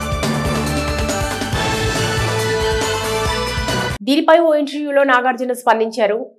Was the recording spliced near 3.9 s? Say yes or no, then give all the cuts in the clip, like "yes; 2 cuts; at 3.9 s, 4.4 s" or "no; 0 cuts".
yes; 1 cut; at 3.9 s